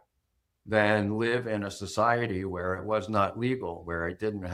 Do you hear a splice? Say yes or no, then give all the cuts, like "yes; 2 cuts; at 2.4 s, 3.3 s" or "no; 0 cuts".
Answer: no; 0 cuts